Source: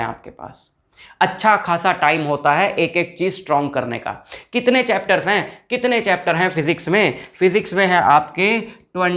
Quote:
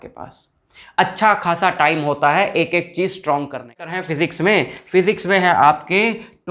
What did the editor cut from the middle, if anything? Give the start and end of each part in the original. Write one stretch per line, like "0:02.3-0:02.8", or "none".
0:04.2-0:06.5